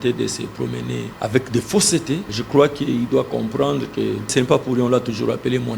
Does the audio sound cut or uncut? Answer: cut